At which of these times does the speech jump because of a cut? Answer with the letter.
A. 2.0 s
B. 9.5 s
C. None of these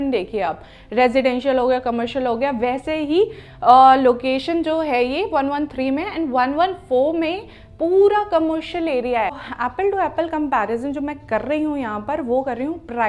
B